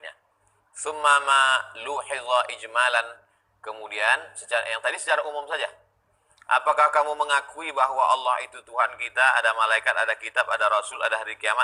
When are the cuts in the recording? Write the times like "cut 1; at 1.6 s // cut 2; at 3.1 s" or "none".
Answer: none